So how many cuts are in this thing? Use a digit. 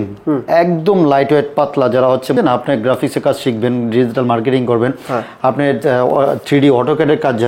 1